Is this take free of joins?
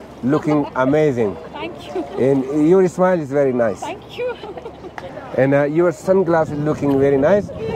no; 1 cut; at 5.1 s

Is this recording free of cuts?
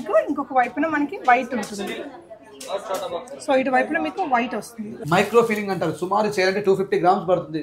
no; 1 cut; at 5.0 s

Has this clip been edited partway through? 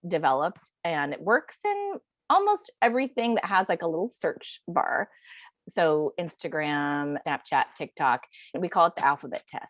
yes; 3 cuts; at 5.5 s, 7.2 s, 8.5 s

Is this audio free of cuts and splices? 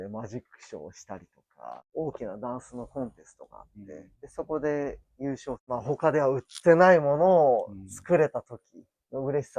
no; 3 cuts; at 1.7 s, 4.2 s, 5.6 s

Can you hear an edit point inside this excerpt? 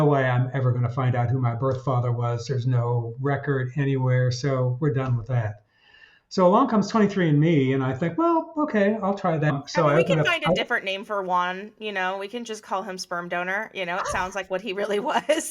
yes; 1 cut; at 9.5 s

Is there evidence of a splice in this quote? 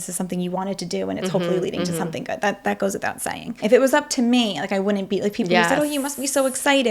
yes; 1 cut; at 3.6 s

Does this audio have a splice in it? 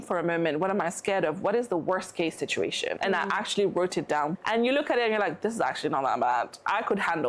yes; 2 cuts; at 3.0 s, 4.3 s

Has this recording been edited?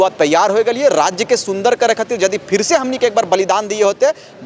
no; 0 cuts

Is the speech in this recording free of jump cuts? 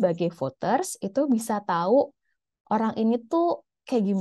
yes; 0 cuts

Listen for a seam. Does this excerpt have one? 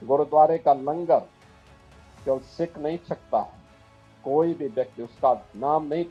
no; 0 cuts

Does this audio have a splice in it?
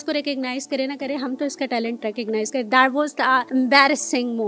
yes; 1 cut; at 3.5 s

